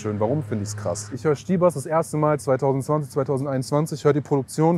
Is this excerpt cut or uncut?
cut